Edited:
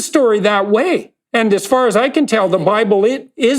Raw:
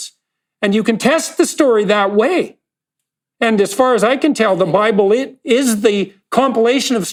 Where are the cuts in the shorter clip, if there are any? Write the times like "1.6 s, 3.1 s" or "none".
1.2 s